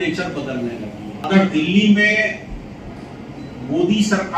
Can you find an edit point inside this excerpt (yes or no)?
yes